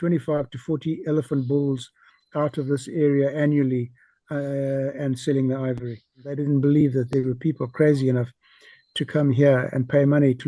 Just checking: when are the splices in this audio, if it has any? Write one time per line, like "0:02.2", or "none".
0:06.4